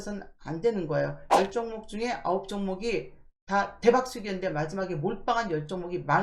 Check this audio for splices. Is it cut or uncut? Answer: uncut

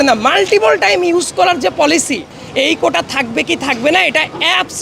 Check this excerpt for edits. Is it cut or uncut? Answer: cut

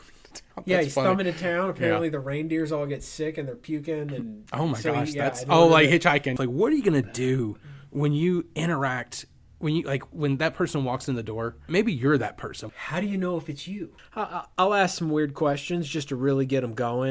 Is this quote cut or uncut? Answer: cut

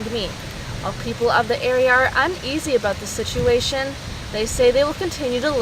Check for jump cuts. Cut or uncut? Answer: uncut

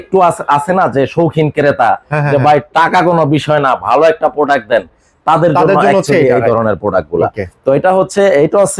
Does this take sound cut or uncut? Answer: uncut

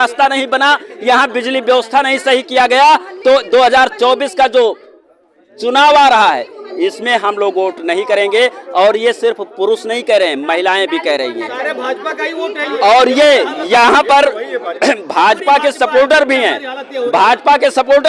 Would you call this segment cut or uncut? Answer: uncut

